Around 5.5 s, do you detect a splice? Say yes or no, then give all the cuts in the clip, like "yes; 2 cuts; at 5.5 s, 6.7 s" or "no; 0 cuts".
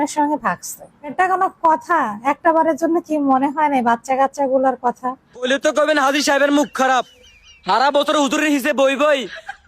yes; 2 cuts; at 1.1 s, 5.5 s